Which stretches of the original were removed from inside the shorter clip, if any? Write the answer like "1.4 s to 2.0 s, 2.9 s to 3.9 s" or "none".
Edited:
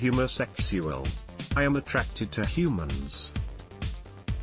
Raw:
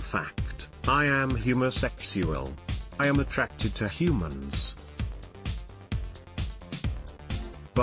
4.5 s to 4.7 s